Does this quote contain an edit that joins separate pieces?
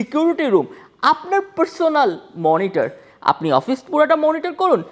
no; 0 cuts

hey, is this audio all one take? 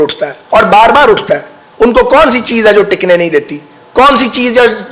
yes; 0 cuts

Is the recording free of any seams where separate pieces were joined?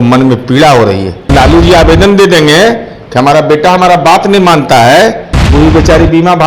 no; 2 cuts; at 1.3 s, 5.4 s

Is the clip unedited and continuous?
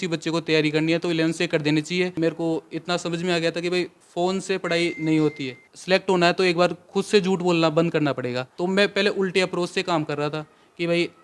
no; 3 cuts; at 2.2 s, 5.7 s, 8.5 s

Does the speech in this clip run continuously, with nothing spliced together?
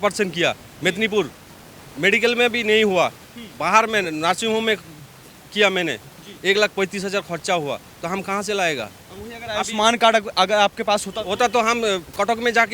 yes; 0 cuts

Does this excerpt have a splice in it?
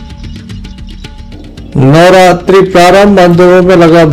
yes; 1 cut; at 1.2 s

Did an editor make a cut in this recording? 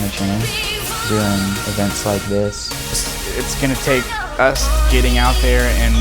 yes; 1 cut; at 3.0 s

